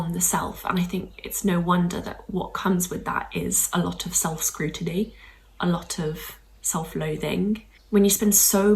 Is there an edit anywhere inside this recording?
yes; 1 cut; at 7.7 s

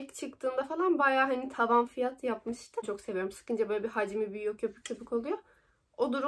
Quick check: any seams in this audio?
yes; 1 cut; at 2.9 s

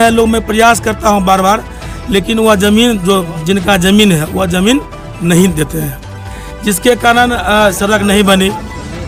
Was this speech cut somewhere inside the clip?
no; 0 cuts

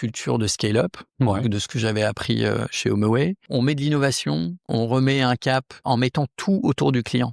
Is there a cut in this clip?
yes; 3 cuts; at 3.5 s, 4.7 s, 5.8 s

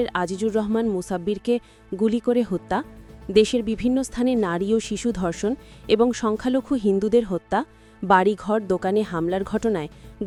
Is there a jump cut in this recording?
no; 0 cuts

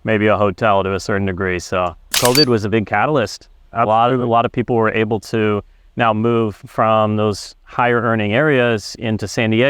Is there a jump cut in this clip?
yes; 1 cut; at 2.0 s

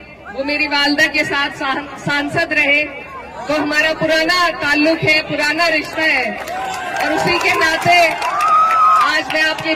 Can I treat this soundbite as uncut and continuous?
yes; 0 cuts

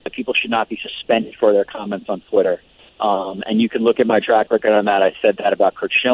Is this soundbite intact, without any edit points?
yes; 0 cuts

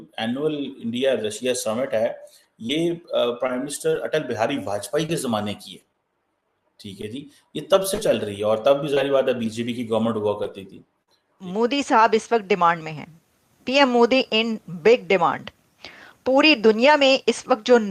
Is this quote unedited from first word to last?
no; 1 cut; at 11.4 s

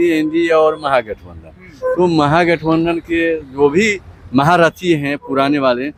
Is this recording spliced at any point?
no; 0 cuts

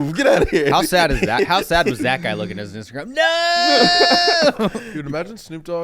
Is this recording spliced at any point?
yes; 1 cut; at 4.9 s

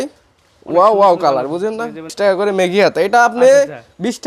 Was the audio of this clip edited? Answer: yes; 1 cut; at 2.1 s

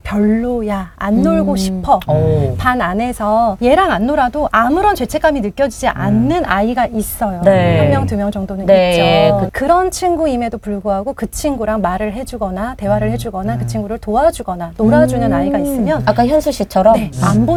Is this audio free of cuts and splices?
yes; 0 cuts

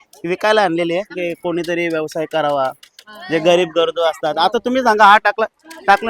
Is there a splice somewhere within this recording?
yes; 1 cut; at 1.1 s

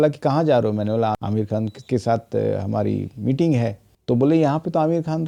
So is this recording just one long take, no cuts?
yes; 0 cuts

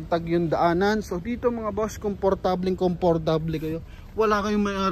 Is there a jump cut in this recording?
no; 0 cuts

